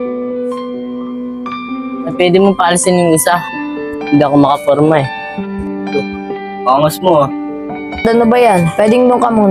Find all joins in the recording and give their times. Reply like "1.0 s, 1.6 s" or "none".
none